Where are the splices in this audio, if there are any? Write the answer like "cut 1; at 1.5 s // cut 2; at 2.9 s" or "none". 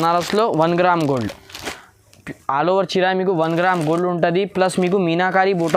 none